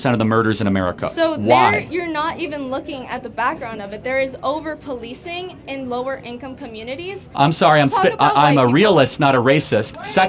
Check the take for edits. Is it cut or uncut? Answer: cut